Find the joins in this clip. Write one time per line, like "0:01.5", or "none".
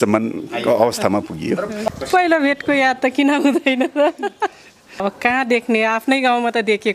0:01.9
0:05.0